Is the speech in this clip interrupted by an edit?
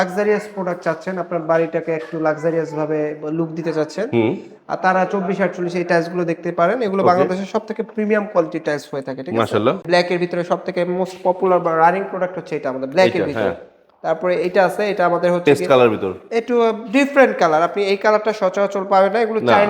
yes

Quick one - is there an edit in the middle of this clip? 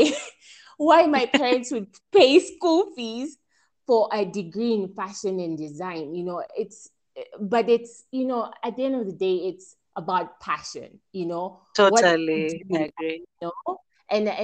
no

